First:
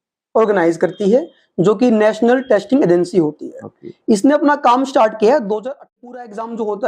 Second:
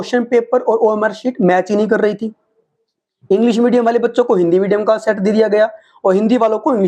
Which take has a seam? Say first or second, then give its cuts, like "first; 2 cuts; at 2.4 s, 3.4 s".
first; 1 cut; at 5.6 s